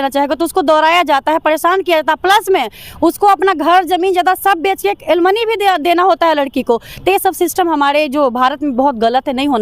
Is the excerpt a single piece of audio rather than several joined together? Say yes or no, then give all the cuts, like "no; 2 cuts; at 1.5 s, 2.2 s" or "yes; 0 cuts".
yes; 0 cuts